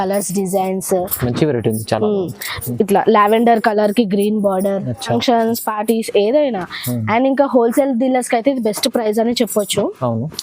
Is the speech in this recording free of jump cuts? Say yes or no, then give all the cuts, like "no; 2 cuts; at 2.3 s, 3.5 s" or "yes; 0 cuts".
no; 1 cut; at 5.1 s